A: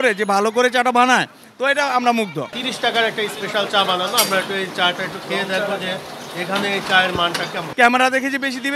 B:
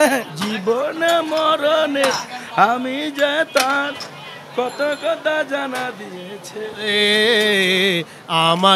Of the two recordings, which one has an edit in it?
A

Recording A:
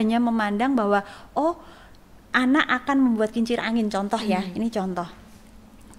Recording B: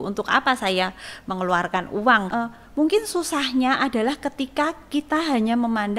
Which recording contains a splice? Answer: B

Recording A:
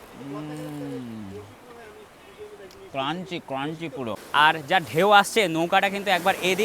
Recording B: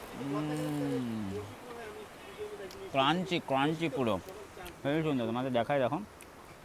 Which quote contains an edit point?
A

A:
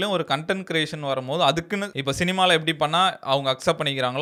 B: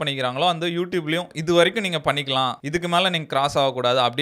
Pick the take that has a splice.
B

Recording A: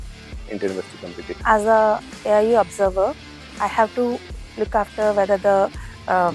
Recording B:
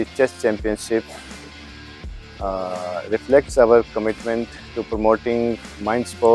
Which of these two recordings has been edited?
A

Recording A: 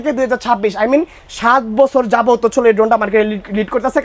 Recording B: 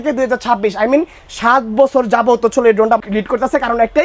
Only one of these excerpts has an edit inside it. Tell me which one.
B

